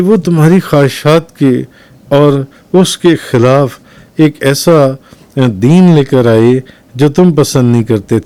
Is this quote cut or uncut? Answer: uncut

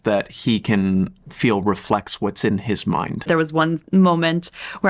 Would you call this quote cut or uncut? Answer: cut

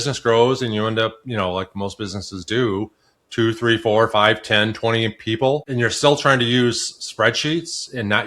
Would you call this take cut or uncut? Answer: cut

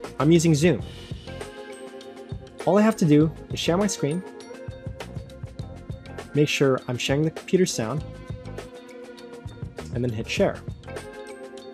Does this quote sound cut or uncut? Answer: cut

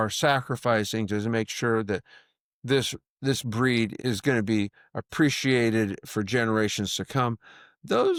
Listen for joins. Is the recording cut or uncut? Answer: uncut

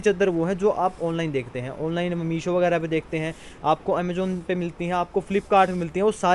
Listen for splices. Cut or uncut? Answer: uncut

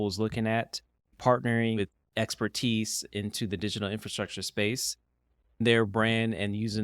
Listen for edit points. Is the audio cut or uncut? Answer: cut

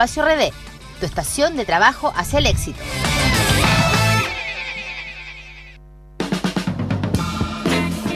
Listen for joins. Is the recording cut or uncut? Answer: cut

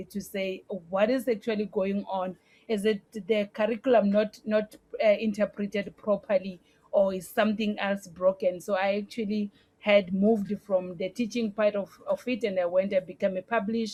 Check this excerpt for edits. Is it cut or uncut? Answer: uncut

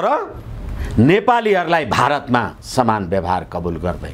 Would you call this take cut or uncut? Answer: uncut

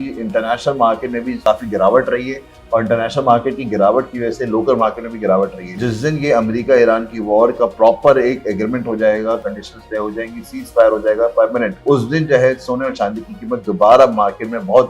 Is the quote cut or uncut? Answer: cut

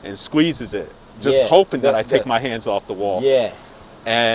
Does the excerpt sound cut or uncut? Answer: uncut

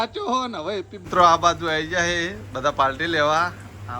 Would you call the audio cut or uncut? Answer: cut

